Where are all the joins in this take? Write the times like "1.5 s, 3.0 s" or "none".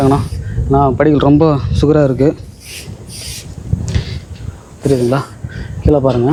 none